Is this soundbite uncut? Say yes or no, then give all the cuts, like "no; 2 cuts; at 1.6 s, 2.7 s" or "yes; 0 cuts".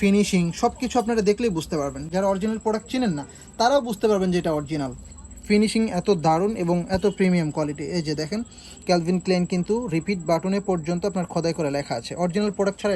yes; 0 cuts